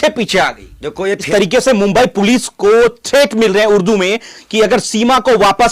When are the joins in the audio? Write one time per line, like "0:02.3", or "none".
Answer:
0:01.2